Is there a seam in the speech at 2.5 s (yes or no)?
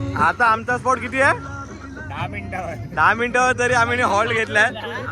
no